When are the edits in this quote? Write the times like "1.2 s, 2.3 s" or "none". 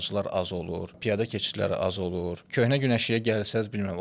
1.0 s, 2.4 s